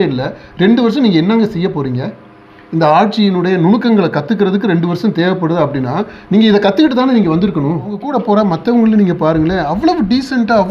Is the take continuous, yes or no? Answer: no